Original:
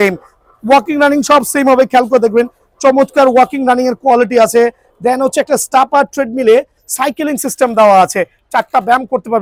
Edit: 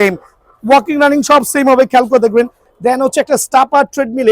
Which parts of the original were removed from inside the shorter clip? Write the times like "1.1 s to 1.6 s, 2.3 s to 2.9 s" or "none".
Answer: 2.7 s to 4.9 s

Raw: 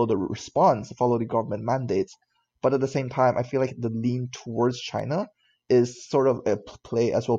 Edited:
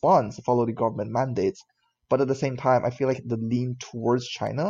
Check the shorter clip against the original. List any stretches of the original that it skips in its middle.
none

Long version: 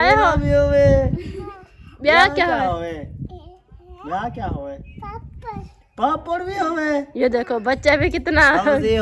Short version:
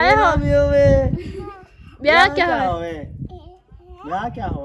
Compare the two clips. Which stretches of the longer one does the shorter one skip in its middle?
none

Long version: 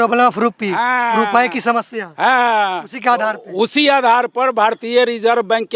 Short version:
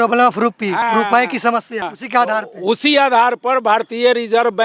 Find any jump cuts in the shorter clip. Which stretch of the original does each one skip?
0.8 s to 1.0 s, 2.1 s to 2.8 s

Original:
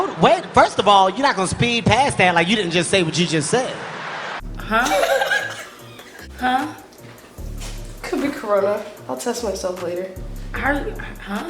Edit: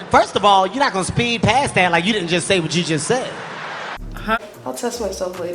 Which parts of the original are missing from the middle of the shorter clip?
4.8 s to 8.8 s

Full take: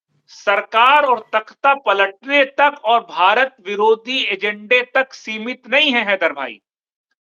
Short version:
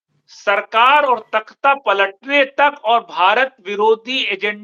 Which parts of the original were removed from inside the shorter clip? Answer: none

